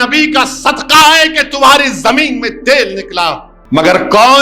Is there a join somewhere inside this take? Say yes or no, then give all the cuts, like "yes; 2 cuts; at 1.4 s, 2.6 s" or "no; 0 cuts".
yes; 1 cut; at 3.5 s